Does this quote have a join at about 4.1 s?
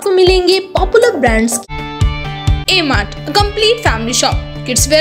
no; 1 cut; at 1.6 s

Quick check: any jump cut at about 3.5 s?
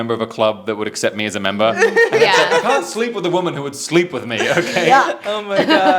no; 0 cuts

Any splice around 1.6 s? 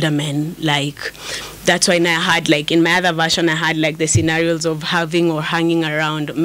no; 0 cuts

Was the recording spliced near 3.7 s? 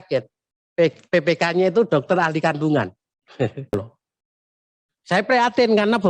yes; 1 cut; at 3.7 s

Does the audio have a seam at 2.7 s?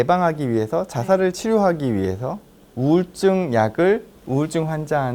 no; 0 cuts

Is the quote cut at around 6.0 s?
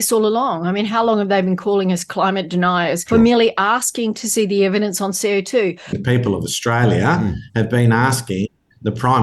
yes; 2 cuts; at 3.0 s, 6.0 s

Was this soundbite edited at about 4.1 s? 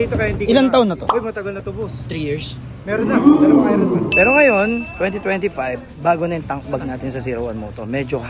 yes; 3 cuts; at 1.0 s, 3.0 s, 4.1 s

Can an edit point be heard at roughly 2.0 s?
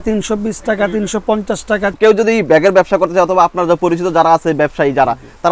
yes; 1 cut; at 2.0 s

